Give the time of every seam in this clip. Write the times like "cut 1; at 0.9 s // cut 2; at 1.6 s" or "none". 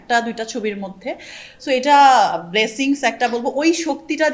none